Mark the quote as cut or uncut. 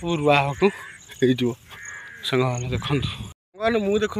cut